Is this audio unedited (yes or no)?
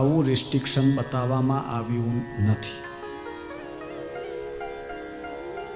yes